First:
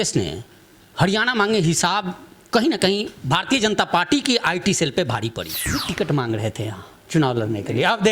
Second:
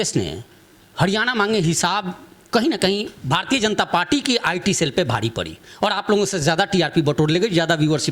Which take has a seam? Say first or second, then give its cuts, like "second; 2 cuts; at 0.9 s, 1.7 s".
first; 1 cut; at 5.7 s